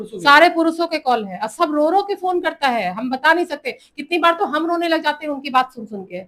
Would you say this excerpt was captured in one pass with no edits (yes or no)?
yes